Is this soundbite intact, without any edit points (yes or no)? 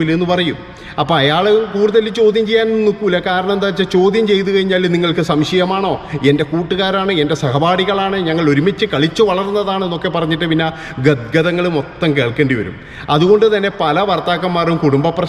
yes